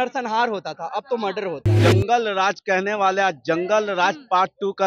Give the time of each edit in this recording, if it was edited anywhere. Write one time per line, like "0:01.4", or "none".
0:01.7